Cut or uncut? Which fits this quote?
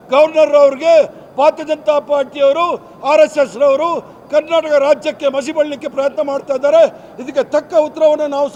uncut